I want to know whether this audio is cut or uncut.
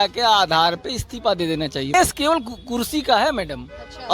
cut